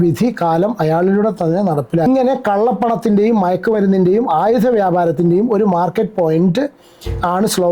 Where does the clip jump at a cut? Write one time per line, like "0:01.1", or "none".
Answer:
0:02.1

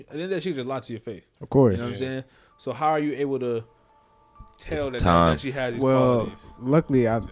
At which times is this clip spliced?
none

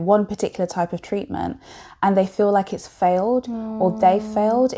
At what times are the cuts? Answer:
none

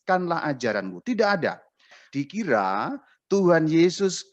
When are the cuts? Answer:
0:02.0

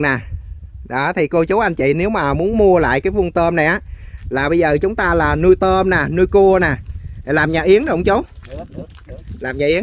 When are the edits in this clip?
none

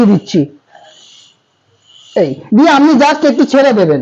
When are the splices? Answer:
none

